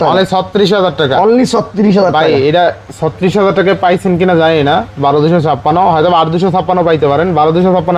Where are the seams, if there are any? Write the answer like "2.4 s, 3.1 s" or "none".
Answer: none